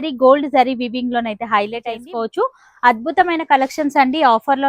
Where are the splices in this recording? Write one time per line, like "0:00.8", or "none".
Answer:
0:02.0

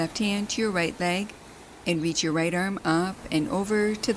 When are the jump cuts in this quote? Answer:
none

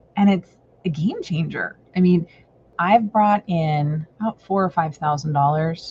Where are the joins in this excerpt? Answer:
0:02.7
0:04.1

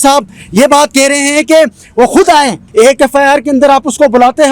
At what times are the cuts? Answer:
0:02.6

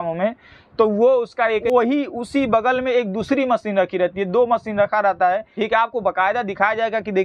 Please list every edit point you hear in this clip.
0:01.6
0:05.5

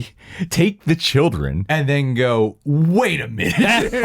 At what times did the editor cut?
0:01.5

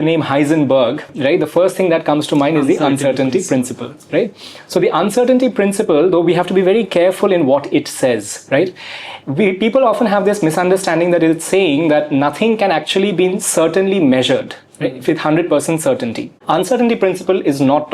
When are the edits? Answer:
0:16.3

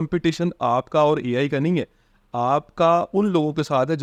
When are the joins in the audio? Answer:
none

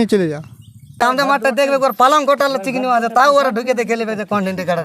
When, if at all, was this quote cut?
0:01.0

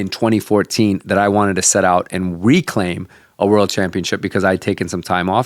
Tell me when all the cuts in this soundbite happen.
none

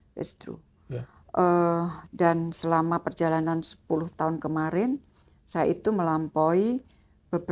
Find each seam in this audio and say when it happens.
none

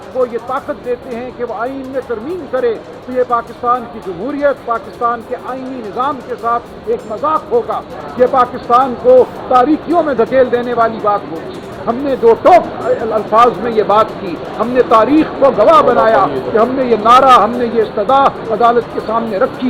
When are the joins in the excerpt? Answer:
none

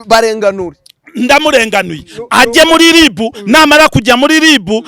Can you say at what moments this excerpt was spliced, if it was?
none

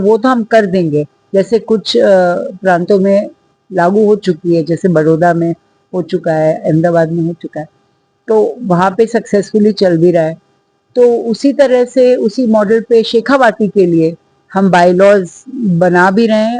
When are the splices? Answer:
none

